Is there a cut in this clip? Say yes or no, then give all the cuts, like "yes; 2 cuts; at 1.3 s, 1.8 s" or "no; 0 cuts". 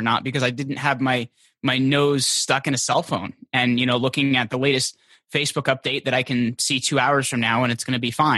no; 0 cuts